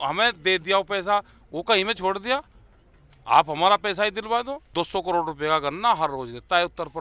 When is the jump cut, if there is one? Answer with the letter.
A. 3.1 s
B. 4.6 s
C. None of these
B